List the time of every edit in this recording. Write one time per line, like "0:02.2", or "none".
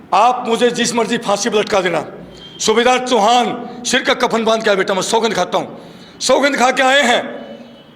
none